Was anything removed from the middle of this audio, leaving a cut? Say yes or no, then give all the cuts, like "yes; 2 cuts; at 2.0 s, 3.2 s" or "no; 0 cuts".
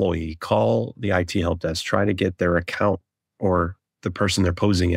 no; 0 cuts